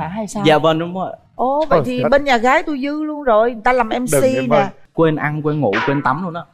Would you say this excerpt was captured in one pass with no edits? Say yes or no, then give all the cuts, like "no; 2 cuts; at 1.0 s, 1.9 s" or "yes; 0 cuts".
no; 1 cut; at 4.8 s